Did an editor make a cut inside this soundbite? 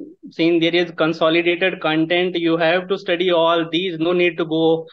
no; 0 cuts

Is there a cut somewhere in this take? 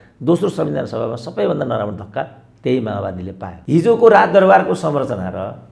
yes; 1 cut; at 3.5 s

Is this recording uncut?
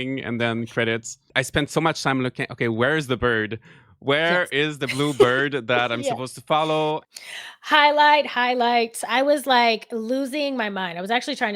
no; 2 cuts; at 1.3 s, 7.1 s

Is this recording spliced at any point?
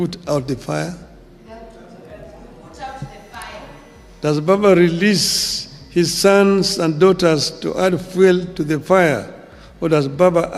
no; 0 cuts

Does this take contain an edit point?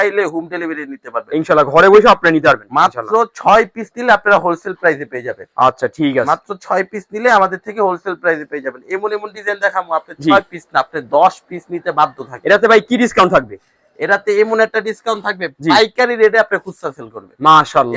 no; 0 cuts

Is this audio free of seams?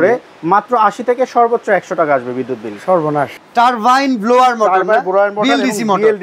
no; 1 cut; at 3.4 s

